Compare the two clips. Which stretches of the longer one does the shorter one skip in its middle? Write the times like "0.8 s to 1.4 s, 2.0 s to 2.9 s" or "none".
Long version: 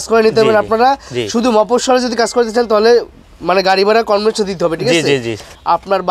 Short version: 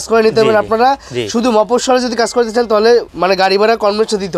3.1 s to 3.4 s